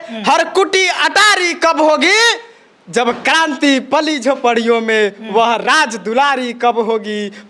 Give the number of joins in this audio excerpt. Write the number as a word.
zero